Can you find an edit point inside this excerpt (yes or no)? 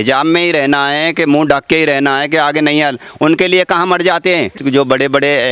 yes